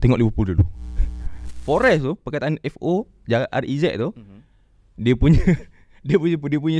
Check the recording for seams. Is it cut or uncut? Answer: cut